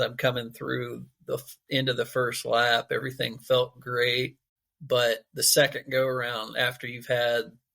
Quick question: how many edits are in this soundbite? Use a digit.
1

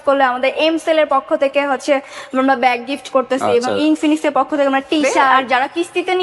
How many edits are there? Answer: 1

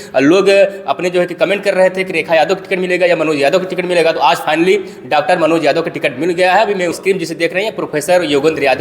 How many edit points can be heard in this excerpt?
1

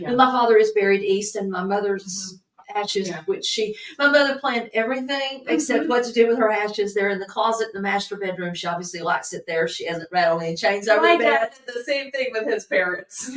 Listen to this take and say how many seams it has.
0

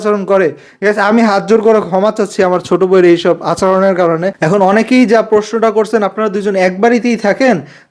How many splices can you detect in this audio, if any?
1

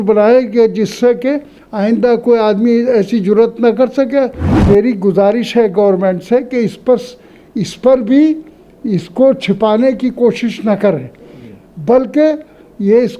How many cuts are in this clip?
1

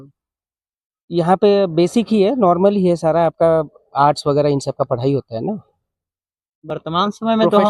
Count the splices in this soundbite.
0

